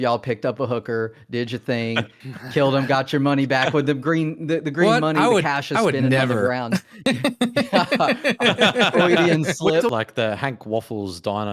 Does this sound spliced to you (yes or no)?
yes